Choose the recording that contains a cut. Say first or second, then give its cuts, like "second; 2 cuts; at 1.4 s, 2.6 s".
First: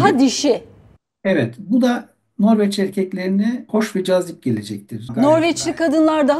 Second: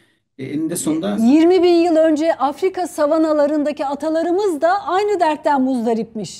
first; 2 cuts; at 3.6 s, 5.0 s